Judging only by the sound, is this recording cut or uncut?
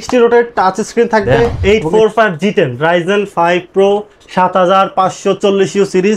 cut